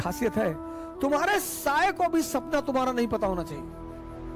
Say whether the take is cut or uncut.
uncut